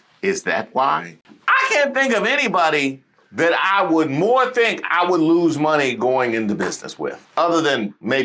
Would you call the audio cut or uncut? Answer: cut